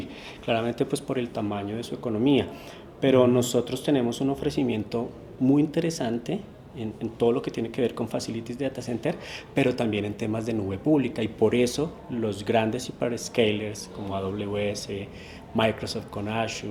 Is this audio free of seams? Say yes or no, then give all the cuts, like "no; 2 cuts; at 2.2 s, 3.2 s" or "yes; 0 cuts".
yes; 0 cuts